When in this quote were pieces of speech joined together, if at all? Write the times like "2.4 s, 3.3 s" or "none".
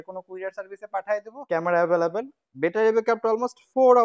1.3 s